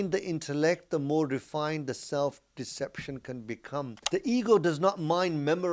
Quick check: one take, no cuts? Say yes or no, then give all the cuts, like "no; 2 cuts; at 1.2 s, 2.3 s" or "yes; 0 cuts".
no; 1 cut; at 4.0 s